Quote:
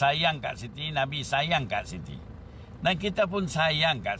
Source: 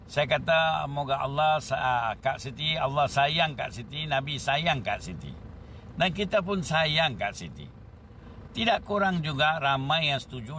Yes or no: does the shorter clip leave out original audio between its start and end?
no